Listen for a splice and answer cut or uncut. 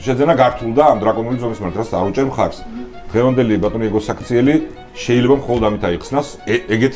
uncut